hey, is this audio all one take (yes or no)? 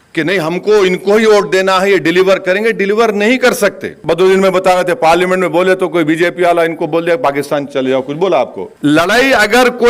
no